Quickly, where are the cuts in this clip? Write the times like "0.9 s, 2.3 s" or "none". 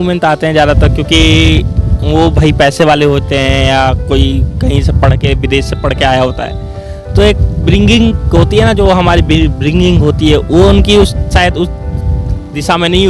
none